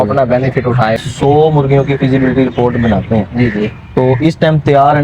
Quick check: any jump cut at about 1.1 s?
yes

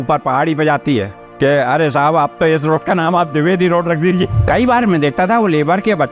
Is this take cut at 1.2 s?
yes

